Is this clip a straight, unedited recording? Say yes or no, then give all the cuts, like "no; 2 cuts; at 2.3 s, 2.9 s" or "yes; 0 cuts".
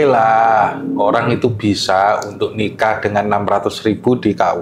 yes; 0 cuts